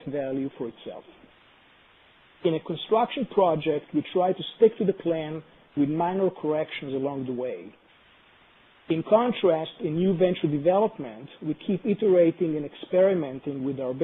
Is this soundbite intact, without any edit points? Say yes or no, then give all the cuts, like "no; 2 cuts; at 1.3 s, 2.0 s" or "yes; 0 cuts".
yes; 0 cuts